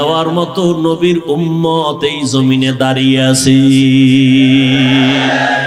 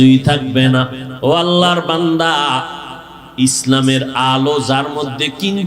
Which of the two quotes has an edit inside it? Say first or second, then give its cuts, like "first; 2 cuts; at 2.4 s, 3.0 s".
second; 1 cut; at 1.0 s